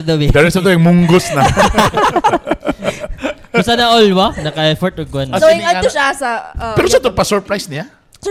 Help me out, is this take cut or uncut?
uncut